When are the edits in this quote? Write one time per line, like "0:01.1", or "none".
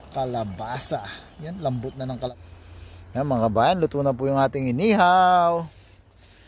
0:02.3